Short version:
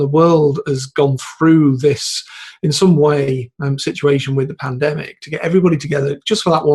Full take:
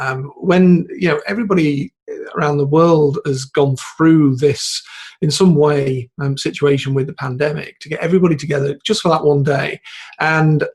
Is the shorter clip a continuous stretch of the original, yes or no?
yes